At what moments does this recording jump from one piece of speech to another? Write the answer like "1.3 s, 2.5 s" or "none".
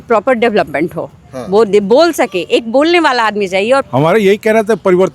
3.9 s